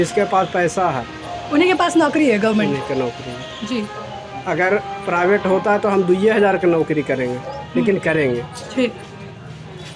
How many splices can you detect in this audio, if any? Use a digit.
0